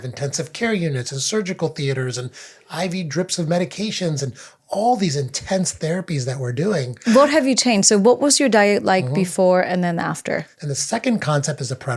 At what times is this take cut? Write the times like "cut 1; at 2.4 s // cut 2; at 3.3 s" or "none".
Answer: cut 1; at 6.9 s // cut 2; at 10.5 s